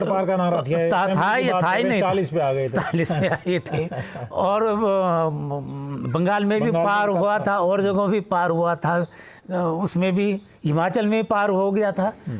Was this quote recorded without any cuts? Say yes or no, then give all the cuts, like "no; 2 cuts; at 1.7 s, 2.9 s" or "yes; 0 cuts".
yes; 0 cuts